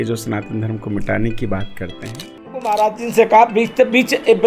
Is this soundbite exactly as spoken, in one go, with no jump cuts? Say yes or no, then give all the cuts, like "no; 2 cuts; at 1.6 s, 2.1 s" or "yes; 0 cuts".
no; 1 cut; at 2.7 s